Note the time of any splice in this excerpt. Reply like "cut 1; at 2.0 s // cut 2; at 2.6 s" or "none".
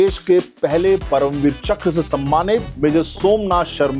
cut 1; at 2.7 s